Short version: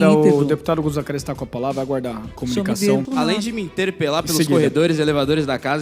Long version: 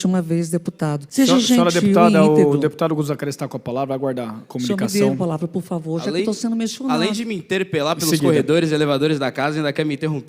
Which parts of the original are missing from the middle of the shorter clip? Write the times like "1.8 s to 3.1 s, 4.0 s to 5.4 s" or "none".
5.2 s to 6.8 s